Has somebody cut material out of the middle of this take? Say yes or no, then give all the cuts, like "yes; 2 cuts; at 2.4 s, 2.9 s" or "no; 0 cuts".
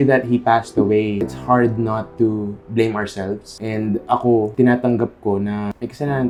no; 0 cuts